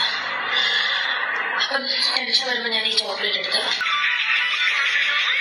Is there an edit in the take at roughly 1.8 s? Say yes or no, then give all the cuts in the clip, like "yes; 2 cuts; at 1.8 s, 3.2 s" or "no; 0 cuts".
no; 1 cut; at 3.8 s